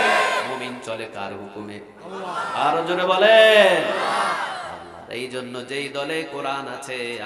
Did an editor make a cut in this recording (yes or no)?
no